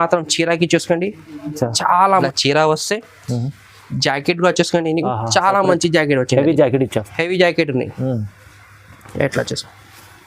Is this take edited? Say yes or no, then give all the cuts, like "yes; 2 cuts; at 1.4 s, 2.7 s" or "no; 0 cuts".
yes; 1 cut; at 2.1 s